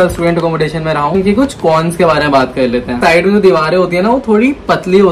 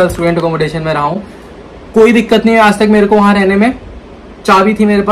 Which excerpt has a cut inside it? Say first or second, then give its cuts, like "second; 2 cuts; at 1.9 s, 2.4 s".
first; 2 cuts; at 1.1 s, 3.0 s